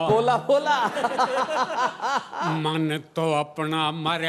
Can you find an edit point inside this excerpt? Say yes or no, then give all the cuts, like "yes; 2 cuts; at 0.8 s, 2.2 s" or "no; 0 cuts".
no; 0 cuts